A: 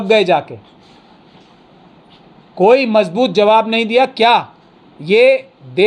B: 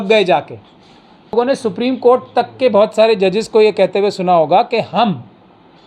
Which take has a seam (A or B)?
B